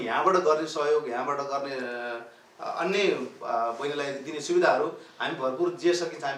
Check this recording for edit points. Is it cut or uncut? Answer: uncut